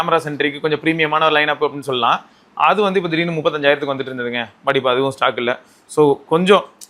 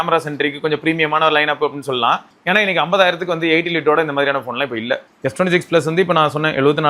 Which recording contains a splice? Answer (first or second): second